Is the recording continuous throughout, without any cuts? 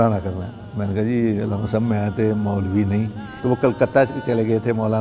no; 1 cut; at 3.2 s

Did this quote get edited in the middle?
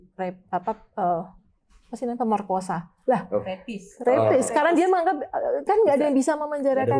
no; 0 cuts

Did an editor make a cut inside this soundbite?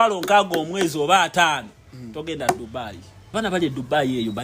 yes; 1 cut; at 3.3 s

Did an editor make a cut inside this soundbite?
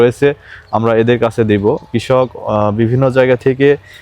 yes; 1 cut; at 1.9 s

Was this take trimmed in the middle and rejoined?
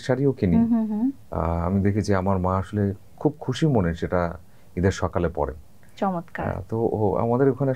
no; 0 cuts

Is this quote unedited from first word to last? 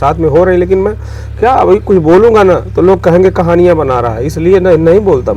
yes; 0 cuts

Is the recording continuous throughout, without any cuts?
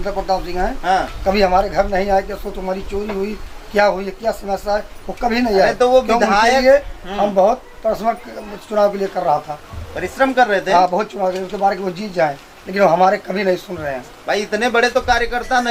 yes; 0 cuts

